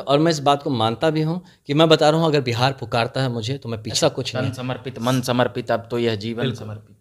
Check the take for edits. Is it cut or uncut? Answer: cut